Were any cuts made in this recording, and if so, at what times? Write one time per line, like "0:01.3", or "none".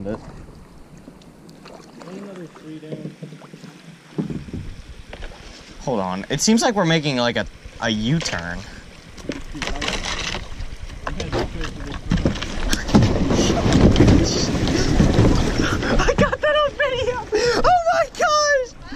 none